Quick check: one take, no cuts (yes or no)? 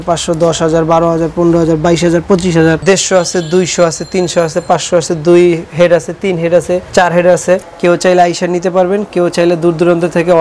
no